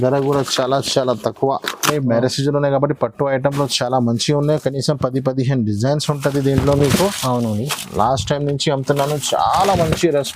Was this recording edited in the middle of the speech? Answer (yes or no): yes